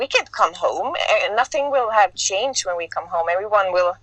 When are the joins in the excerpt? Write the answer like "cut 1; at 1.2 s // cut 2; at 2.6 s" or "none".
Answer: none